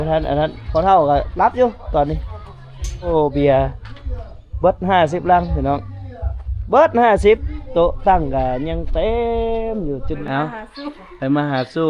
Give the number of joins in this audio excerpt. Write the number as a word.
two